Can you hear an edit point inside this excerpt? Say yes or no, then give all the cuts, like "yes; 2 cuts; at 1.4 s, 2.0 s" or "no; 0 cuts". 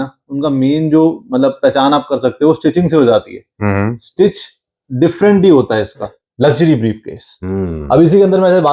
yes; 1 cut; at 6.2 s